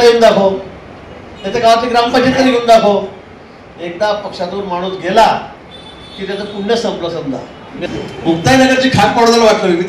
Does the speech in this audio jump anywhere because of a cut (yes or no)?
yes